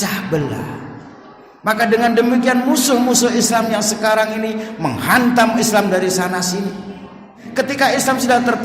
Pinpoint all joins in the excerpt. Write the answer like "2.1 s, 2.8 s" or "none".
7.4 s